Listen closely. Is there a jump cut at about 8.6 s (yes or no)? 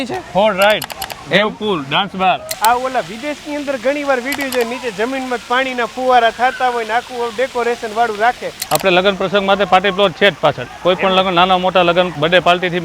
yes